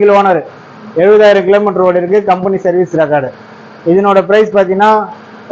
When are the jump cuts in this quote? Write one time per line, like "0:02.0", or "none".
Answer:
none